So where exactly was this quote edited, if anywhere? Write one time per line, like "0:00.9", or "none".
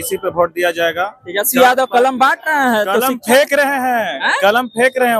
none